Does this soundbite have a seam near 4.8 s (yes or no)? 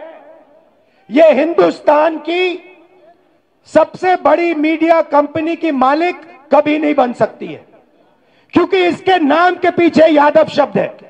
no